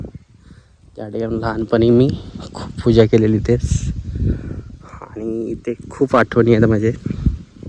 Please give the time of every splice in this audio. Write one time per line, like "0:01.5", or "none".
none